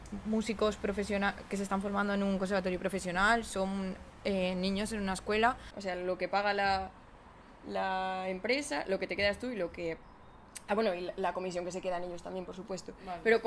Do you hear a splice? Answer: yes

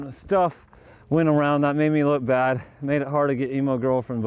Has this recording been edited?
no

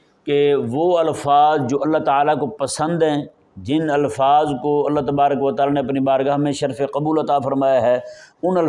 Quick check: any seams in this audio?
no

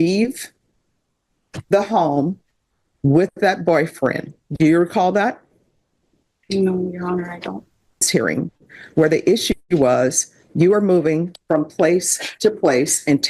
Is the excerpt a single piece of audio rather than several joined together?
no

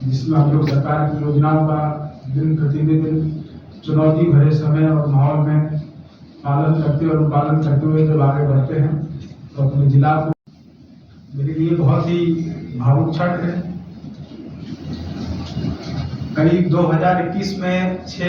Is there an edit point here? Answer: yes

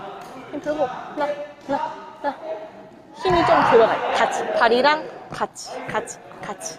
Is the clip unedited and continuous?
yes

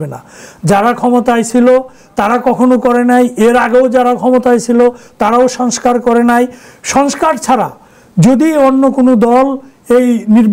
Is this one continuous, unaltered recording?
yes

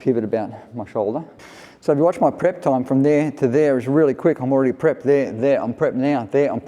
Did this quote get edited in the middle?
yes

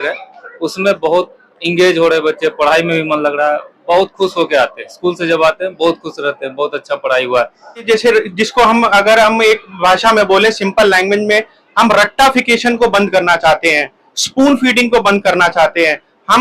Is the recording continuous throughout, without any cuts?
no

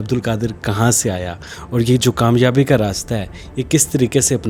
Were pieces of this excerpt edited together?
no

